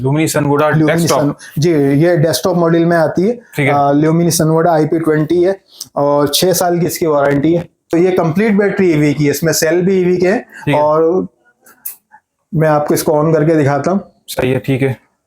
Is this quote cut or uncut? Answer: cut